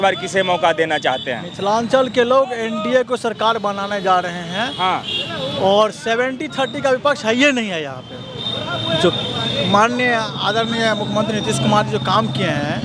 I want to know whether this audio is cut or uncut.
uncut